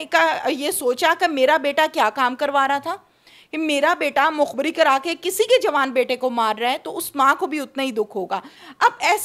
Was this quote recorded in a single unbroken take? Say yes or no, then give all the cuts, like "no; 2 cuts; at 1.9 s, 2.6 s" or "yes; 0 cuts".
yes; 0 cuts